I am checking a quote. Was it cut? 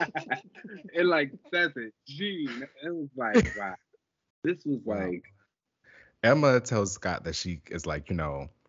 yes; 1 cut; at 5.8 s

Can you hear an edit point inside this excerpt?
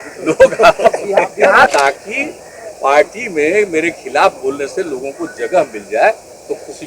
yes; 1 cut; at 1.7 s

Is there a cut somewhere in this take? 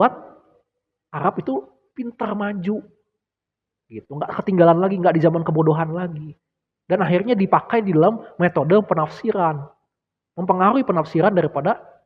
no; 0 cuts

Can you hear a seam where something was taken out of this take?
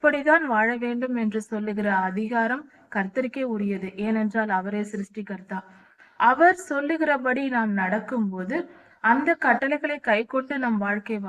no; 0 cuts

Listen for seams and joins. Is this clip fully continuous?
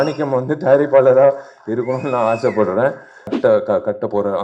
no; 1 cut; at 3.3 s

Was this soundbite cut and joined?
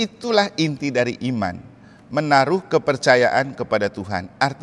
no; 0 cuts

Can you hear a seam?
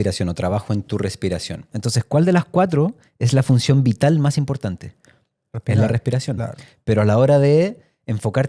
yes; 1 cut; at 1.7 s

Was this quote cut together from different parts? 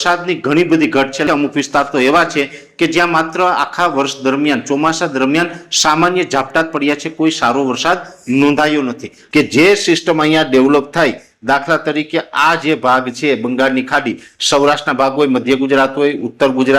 yes; 3 cuts; at 1.2 s, 9.2 s, 14.3 s

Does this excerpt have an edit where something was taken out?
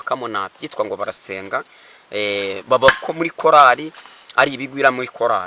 no; 0 cuts

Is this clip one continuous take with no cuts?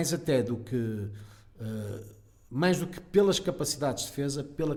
yes; 0 cuts

